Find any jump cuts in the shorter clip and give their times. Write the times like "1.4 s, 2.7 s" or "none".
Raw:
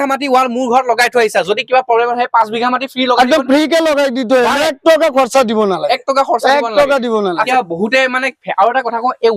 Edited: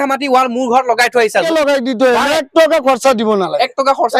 1.5 s